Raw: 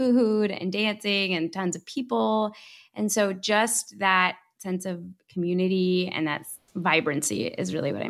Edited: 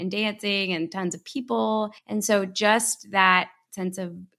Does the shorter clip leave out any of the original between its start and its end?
yes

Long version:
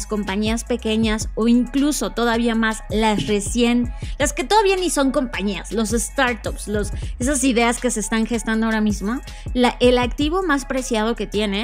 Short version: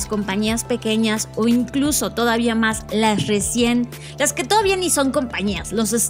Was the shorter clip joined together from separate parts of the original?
no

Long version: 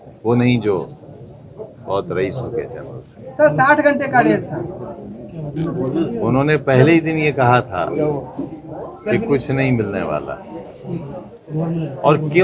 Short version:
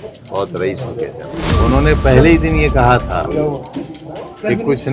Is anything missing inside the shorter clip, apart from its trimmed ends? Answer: yes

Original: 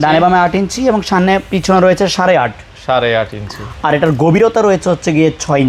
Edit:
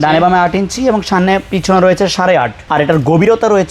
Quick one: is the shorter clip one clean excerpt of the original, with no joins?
no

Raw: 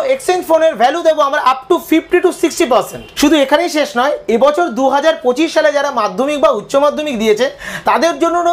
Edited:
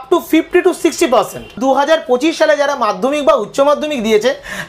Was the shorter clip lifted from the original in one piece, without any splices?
no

